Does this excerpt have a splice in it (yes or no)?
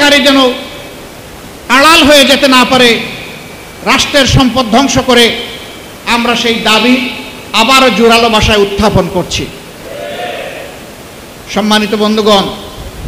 no